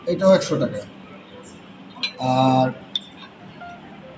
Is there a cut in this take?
no; 0 cuts

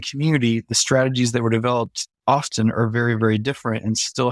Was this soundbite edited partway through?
no; 0 cuts

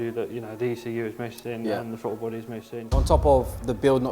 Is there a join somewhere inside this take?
yes; 1 cut; at 2.8 s

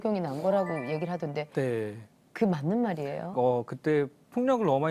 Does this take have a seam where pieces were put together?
no; 0 cuts

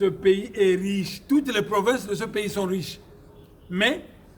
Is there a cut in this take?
no; 0 cuts

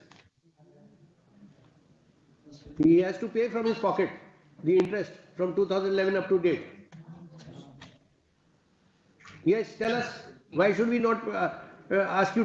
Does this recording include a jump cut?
no; 0 cuts

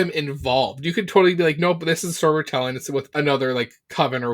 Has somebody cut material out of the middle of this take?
yes; 1 cut; at 3.1 s

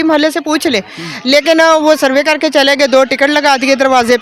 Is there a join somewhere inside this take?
no; 0 cuts

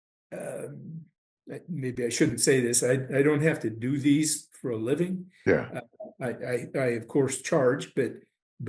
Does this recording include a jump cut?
no; 0 cuts

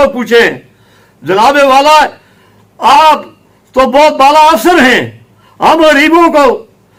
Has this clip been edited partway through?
no; 0 cuts

